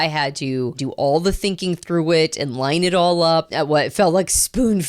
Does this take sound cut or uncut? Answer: cut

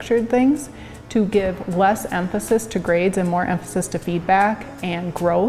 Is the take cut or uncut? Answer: uncut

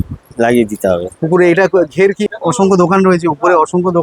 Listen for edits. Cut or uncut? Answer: cut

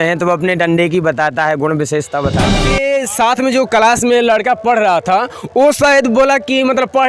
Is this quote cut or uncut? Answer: cut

